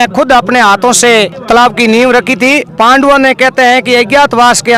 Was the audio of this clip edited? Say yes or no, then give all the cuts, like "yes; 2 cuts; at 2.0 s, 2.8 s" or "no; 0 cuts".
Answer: yes; 2 cuts; at 1.4 s, 2.7 s